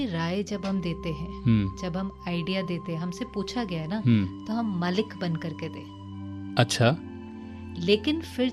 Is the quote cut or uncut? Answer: uncut